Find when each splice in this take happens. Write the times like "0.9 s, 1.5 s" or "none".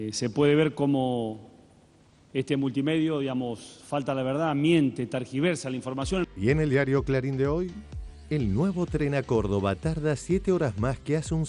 none